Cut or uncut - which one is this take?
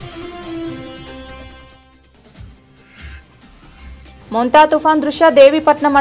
uncut